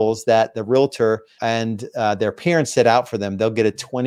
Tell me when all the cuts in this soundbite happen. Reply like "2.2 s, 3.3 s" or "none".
1.3 s